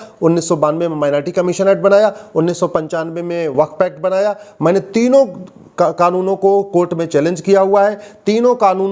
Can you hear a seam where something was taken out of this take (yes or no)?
no